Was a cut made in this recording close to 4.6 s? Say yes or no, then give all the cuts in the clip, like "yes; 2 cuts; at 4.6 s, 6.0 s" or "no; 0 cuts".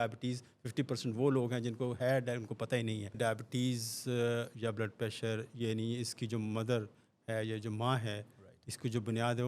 no; 1 cut; at 3.2 s